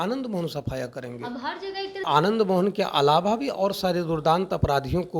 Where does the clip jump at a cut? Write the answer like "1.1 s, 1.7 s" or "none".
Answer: 2.0 s

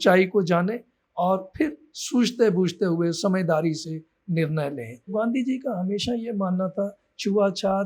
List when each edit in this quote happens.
5.1 s

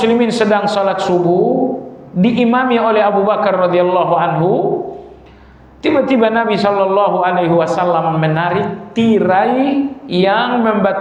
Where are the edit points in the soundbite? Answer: none

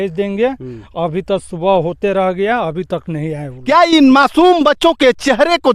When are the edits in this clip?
3.5 s

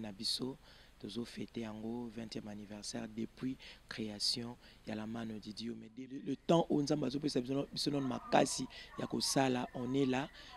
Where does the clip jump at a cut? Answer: 5.8 s

